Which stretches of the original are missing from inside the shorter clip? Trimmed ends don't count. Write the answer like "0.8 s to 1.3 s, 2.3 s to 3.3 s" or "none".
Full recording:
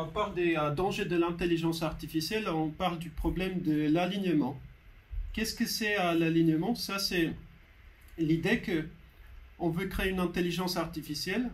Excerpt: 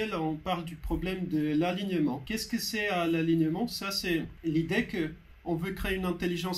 4.6 s to 5.4 s, 7.4 s to 8.1 s, 9.0 s to 9.4 s